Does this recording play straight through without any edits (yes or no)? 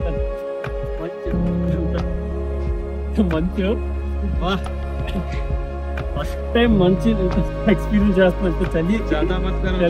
yes